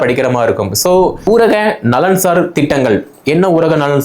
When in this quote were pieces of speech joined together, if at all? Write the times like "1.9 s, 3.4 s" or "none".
1.3 s